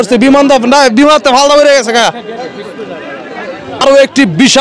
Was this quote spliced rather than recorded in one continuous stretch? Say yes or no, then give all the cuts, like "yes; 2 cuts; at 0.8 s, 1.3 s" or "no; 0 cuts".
yes; 1 cut; at 3.6 s